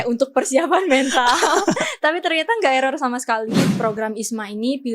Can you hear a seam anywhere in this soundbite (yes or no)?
yes